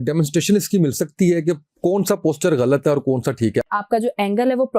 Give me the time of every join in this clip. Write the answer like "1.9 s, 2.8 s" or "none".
3.7 s